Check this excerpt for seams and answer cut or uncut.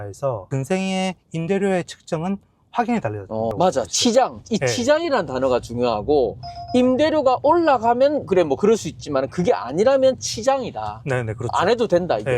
cut